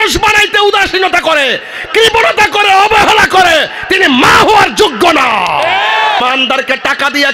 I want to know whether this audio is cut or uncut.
cut